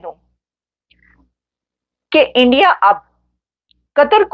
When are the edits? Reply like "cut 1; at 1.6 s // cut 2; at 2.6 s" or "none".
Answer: none